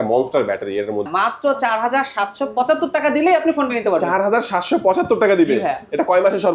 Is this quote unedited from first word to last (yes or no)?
no